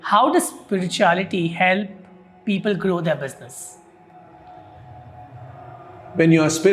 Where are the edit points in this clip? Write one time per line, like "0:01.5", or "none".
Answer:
none